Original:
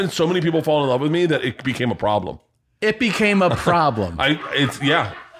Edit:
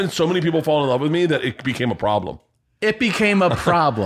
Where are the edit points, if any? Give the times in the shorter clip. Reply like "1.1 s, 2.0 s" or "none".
none